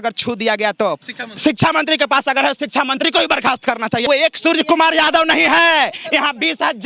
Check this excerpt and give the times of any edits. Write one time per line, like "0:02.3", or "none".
0:01.0
0:04.0